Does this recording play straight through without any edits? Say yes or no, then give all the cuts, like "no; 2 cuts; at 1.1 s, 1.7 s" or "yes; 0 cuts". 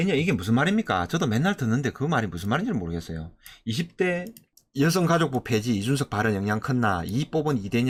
yes; 0 cuts